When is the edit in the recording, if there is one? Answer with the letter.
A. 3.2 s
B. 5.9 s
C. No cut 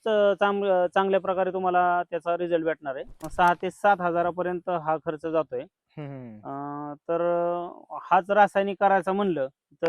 A